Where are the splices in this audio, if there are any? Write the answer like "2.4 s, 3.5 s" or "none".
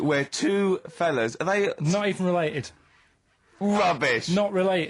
none